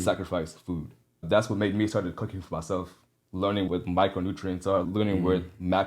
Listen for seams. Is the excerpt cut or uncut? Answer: cut